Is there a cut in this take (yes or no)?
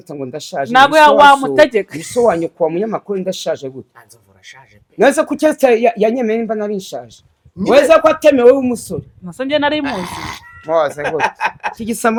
no